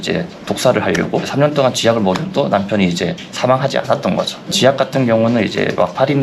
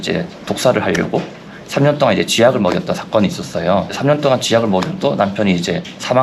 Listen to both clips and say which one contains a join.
first; 2 cuts; at 1.3 s, 4.5 s

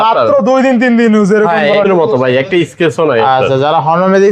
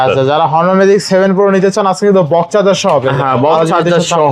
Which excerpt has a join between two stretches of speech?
first; 1 cut; at 1.8 s

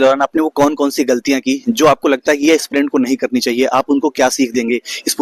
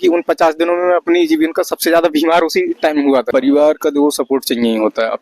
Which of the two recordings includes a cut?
second; 1 cut; at 3.3 s

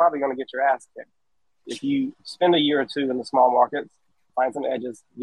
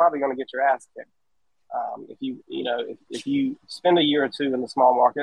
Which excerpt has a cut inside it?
first; 2 cuts; at 1.6 s, 4.2 s

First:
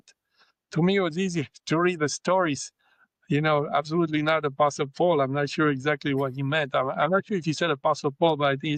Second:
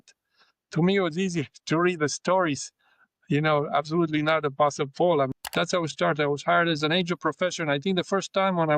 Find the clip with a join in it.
second; 1 cut; at 5.3 s

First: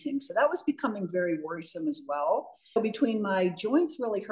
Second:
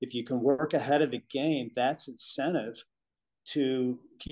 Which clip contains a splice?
first; 1 cut; at 2.8 s

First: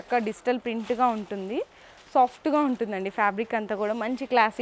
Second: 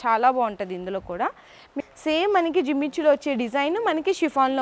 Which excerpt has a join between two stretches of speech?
second; 1 cut; at 1.7 s

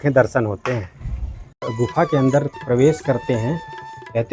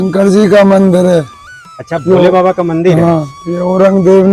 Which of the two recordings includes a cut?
first; 1 cut; at 1.7 s

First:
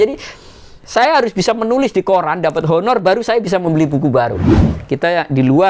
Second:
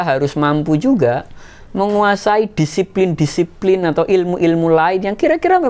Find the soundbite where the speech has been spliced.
first; 1 cut; at 4.6 s

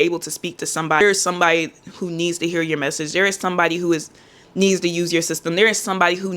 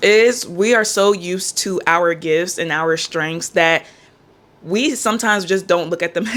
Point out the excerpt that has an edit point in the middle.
first; 1 cut; at 1.0 s

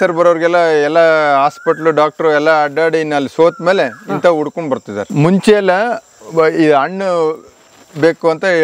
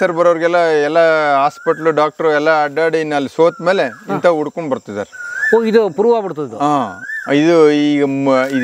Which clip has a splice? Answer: first; 1 cut; at 5.0 s

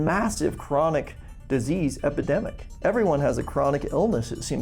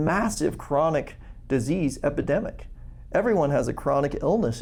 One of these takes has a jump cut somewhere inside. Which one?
first; 1 cut; at 2.6 s

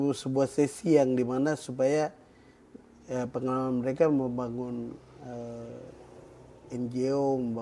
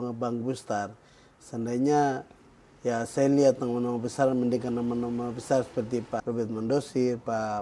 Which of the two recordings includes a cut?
second; 1 cut; at 6.2 s

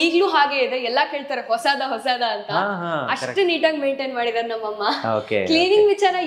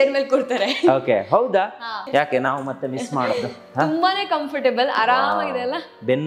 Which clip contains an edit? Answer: second; 1 cut; at 2.0 s

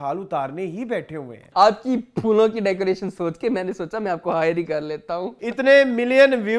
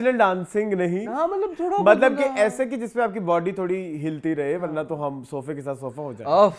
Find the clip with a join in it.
first; 2 cuts; at 1.4 s, 5.3 s

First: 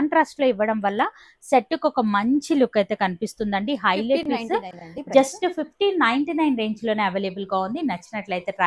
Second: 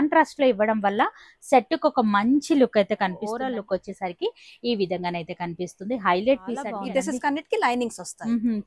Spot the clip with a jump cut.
second; 2 cuts; at 3.3 s, 6.7 s

